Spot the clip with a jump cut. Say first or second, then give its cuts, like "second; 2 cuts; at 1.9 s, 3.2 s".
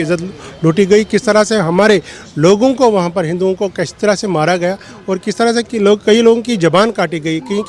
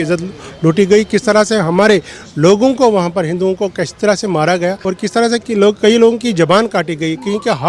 second; 1 cut; at 4.8 s